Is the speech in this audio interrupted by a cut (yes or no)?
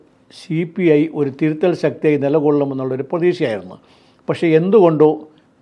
no